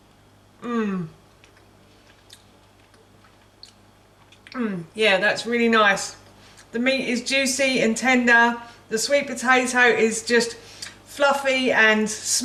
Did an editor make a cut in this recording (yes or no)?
no